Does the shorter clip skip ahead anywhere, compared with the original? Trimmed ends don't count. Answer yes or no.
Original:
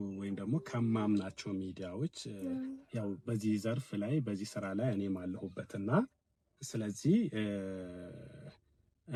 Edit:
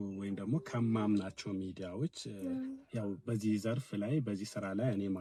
no